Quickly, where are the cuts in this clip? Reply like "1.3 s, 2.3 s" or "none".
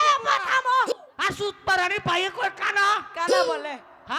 0.9 s